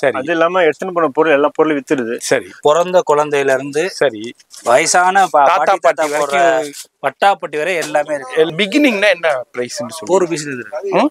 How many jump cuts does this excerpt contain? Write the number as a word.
two